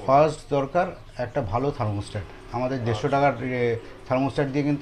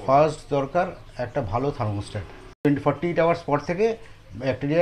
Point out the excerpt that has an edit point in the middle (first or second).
second